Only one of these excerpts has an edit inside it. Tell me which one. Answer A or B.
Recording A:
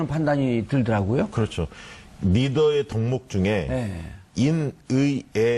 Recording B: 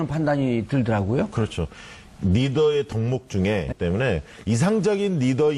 A